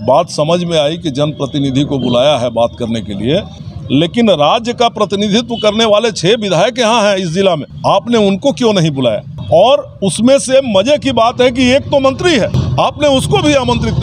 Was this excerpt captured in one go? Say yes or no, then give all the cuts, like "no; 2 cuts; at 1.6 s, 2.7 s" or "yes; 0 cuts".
no; 4 cuts; at 3.6 s, 7.7 s, 9.3 s, 12.6 s